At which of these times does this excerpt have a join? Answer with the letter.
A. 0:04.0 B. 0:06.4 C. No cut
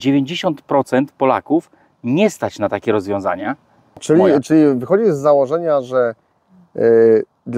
A